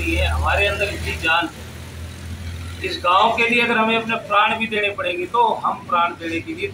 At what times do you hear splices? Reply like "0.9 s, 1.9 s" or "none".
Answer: none